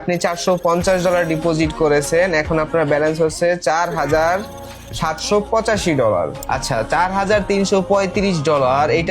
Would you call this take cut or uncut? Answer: cut